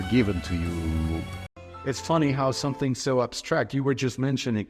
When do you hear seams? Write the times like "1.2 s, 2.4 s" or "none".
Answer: 1.5 s